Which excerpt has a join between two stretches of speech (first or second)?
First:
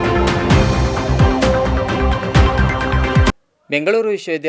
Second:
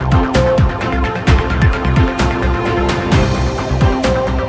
first